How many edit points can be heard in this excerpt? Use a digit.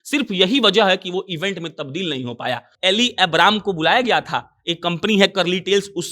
1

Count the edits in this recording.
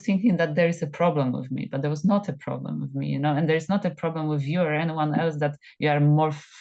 0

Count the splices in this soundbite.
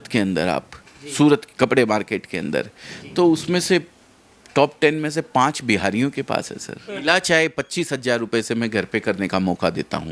1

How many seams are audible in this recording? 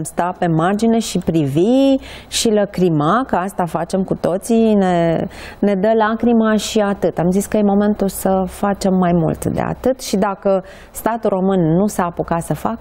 0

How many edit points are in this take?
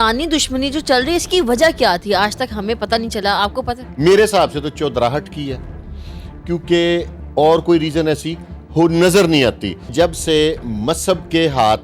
2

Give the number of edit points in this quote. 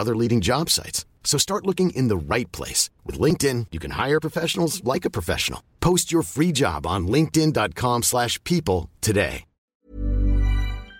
1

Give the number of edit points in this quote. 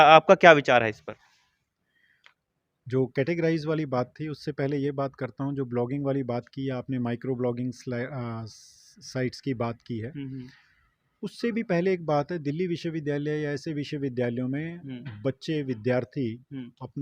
0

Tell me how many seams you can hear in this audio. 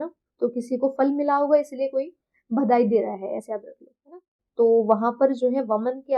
1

